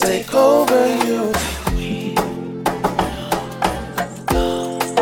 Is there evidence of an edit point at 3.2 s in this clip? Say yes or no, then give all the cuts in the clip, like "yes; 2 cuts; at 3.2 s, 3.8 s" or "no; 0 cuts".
no; 1 cut; at 1.3 s